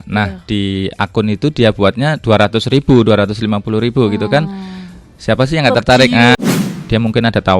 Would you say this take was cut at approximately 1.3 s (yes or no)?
no